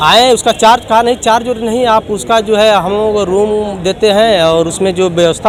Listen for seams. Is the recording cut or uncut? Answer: uncut